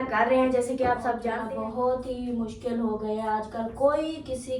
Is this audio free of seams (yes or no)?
no